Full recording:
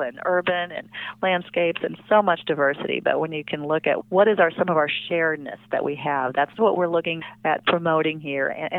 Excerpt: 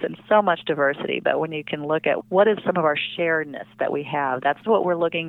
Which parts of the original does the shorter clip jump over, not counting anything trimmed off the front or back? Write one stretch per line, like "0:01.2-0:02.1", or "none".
0:04.4-0:04.5

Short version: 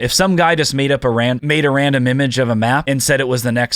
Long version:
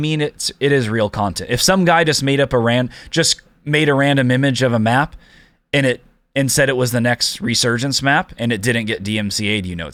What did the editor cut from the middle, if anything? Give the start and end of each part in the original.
0:02.9-0:03.7
0:05.1-0:06.3

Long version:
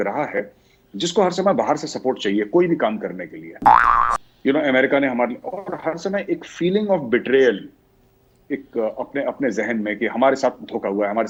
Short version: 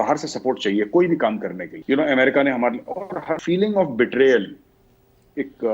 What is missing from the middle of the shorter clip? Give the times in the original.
0:03.3-0:04.3
0:05.9-0:06.5

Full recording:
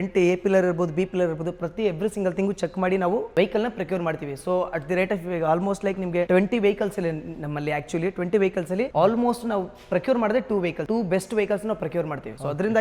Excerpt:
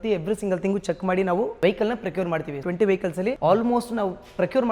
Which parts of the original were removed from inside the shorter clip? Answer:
0:04.4-0:08.2

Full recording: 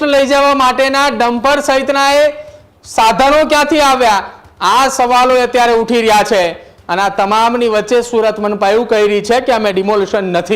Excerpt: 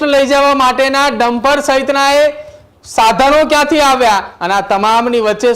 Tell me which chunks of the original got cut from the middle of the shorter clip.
0:04.3-0:06.8

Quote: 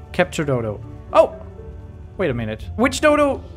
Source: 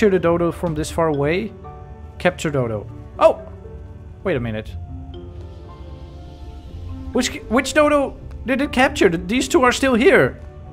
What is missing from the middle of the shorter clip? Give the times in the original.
0:04.7-0:07.4

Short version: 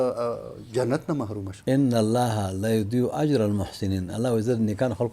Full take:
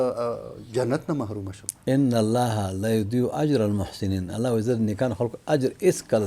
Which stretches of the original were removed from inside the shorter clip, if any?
0:01.5-0:01.7

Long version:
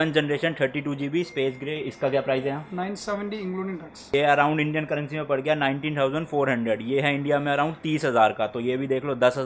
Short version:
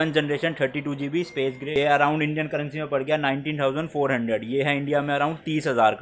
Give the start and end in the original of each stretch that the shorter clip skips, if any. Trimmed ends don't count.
0:01.6-0:04.0

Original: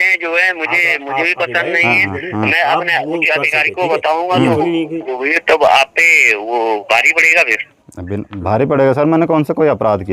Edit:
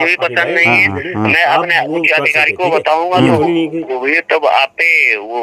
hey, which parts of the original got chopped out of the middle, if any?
none

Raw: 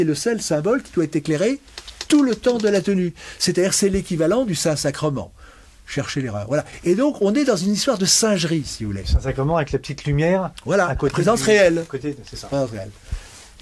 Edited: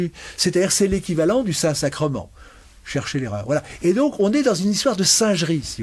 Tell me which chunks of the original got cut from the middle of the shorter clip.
none

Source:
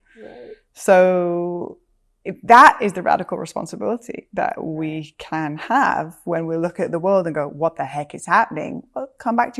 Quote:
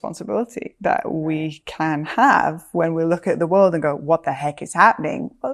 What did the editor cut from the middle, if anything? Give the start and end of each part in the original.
none

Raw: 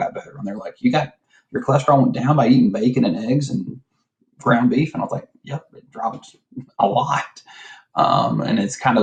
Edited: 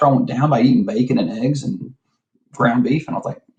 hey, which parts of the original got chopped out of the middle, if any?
none

